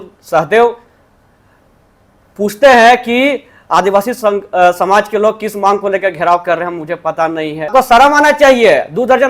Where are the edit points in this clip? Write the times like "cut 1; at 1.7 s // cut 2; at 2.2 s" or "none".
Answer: cut 1; at 7.7 s